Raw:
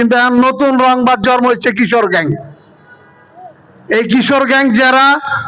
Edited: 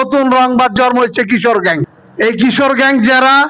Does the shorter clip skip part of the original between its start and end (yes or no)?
yes